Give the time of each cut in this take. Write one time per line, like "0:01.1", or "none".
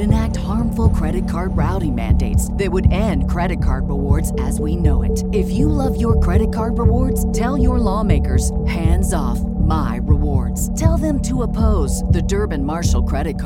none